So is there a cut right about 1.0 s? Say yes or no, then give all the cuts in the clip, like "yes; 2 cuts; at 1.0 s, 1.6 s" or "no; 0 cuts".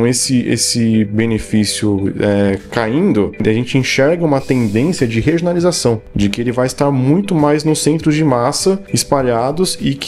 no; 3 cuts; at 3.4 s, 6.1 s, 8.9 s